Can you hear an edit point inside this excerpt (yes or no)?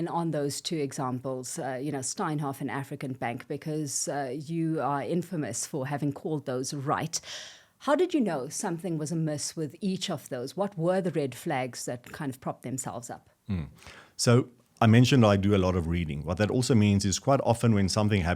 no